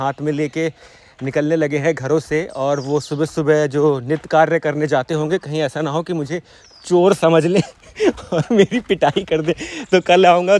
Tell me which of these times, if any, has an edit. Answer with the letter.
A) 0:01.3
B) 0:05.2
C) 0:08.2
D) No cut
D